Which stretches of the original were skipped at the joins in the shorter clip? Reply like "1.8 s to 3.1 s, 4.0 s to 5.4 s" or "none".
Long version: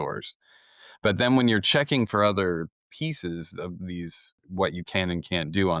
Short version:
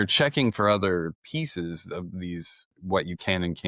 2.8 s to 2.9 s